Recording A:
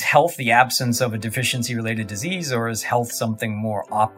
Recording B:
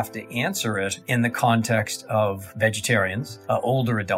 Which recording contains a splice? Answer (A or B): B